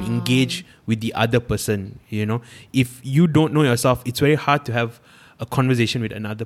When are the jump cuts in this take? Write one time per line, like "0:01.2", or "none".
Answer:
none